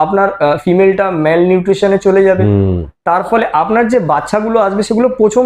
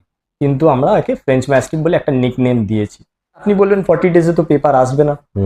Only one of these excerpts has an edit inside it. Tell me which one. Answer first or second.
second